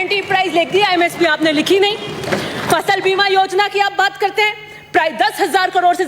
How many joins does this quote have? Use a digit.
0